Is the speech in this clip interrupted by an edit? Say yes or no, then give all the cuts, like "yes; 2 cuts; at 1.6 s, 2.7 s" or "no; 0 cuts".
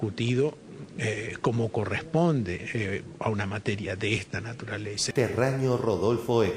yes; 1 cut; at 5.1 s